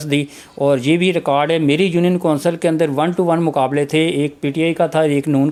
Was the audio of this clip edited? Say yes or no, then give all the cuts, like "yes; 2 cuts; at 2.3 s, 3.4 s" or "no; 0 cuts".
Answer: no; 0 cuts